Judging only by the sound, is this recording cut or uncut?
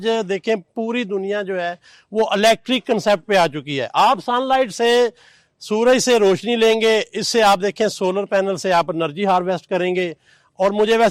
uncut